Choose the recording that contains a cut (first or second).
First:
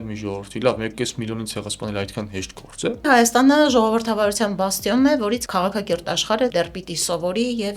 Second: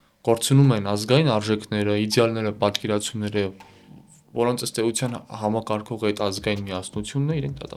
first